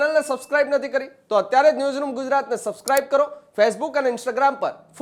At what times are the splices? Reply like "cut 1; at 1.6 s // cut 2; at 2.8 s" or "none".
none